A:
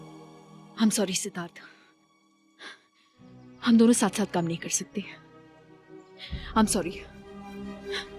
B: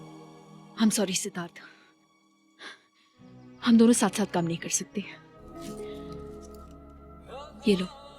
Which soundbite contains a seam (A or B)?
B